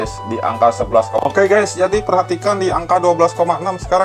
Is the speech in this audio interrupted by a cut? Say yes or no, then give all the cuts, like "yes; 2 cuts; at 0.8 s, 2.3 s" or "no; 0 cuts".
yes; 1 cut; at 1.2 s